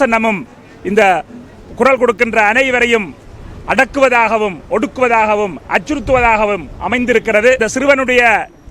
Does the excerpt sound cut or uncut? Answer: cut